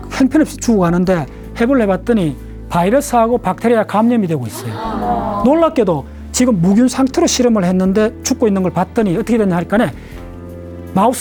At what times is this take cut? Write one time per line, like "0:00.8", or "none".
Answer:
none